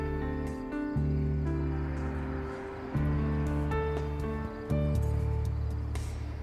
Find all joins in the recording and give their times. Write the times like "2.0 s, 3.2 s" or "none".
5.0 s